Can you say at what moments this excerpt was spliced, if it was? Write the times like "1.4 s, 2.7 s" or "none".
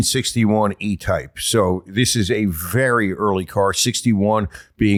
none